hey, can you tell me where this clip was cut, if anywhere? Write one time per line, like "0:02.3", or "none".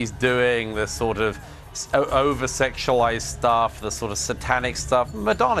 none